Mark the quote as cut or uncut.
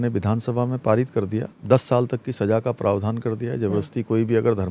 cut